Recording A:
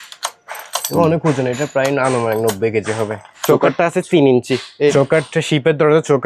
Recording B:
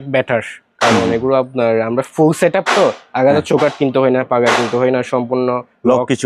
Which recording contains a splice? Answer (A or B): A